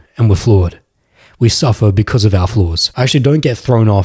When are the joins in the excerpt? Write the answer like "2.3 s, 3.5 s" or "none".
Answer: 2.8 s